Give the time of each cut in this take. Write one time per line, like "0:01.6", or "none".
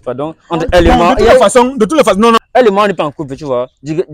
0:02.4